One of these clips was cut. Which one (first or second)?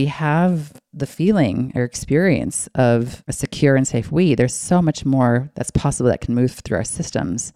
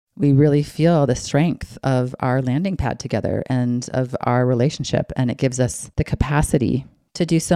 second